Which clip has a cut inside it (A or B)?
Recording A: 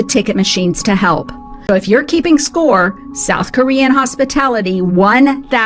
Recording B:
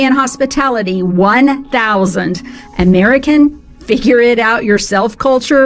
A